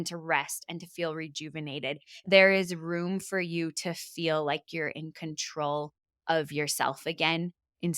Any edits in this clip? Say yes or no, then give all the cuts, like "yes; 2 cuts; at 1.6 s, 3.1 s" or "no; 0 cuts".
yes; 1 cut; at 2.3 s